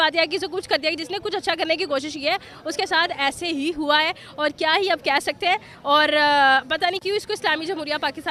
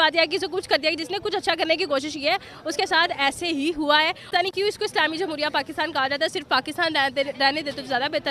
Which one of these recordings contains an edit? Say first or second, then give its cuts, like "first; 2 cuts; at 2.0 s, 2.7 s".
second; 1 cut; at 4.2 s